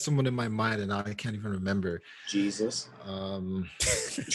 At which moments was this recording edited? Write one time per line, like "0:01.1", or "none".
none